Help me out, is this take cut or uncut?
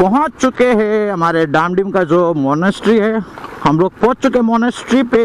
uncut